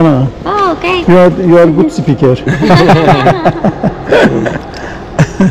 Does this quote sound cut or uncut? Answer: uncut